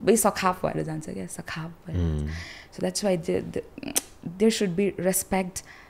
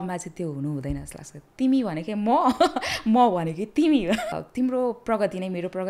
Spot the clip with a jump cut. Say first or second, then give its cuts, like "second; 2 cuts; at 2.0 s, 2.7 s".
second; 1 cut; at 4.3 s